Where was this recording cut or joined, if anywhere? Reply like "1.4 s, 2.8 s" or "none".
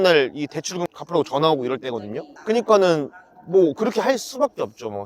none